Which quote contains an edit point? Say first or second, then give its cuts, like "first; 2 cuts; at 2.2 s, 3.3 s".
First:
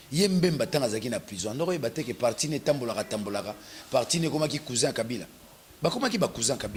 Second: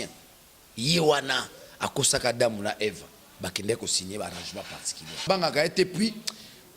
second; 1 cut; at 5.2 s